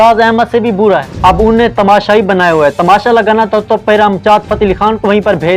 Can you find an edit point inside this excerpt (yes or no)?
yes